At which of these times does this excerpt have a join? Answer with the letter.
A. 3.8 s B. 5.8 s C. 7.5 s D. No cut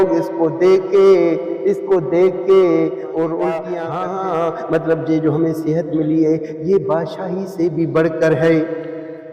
A